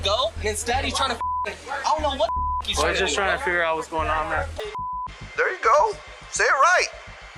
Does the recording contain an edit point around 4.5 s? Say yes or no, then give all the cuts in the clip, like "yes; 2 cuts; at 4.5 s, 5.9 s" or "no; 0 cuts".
yes; 1 cut; at 4.5 s